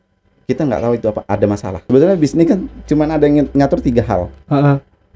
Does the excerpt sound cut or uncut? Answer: cut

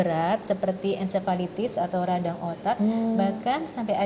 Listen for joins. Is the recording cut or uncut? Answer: uncut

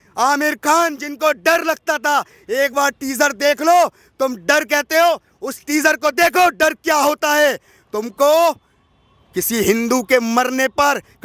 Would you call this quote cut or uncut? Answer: uncut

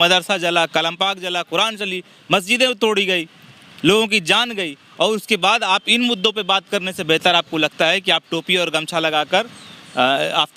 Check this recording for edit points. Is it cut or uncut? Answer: uncut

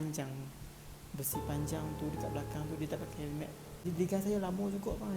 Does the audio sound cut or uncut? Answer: cut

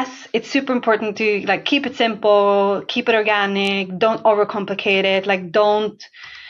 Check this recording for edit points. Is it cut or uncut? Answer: uncut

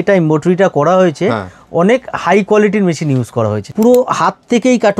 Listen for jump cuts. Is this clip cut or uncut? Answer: cut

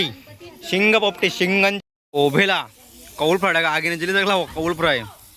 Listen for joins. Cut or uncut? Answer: cut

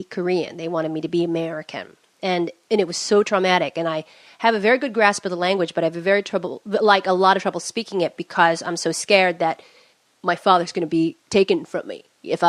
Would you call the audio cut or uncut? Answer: cut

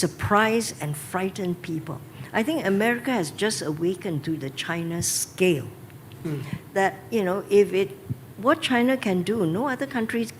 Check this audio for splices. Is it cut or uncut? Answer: uncut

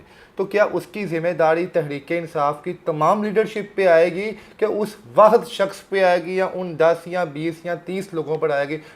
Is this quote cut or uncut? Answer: uncut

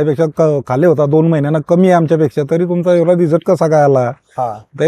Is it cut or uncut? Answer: uncut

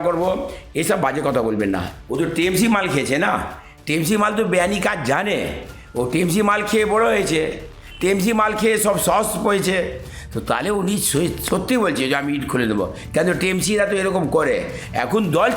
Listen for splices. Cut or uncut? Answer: cut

